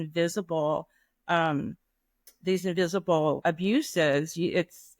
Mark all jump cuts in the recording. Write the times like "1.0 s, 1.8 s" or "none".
3.4 s